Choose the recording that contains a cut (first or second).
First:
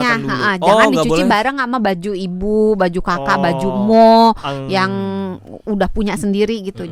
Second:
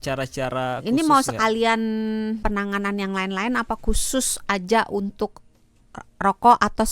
second